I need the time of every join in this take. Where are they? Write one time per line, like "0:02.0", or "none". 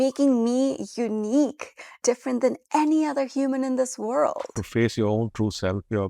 0:02.0
0:04.6